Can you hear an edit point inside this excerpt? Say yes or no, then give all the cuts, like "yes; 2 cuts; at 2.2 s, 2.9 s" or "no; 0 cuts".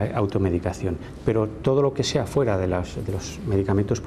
no; 0 cuts